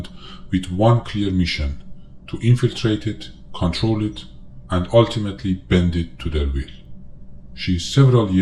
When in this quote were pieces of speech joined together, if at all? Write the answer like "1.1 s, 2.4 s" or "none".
none